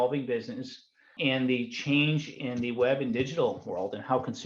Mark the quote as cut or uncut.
cut